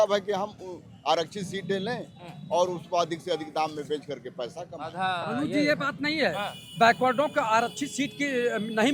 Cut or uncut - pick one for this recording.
uncut